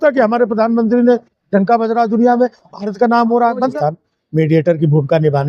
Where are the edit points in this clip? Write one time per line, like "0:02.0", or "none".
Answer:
0:03.7